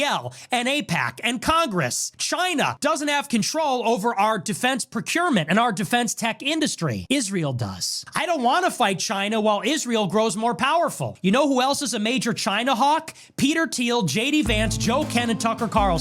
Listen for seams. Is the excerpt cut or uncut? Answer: cut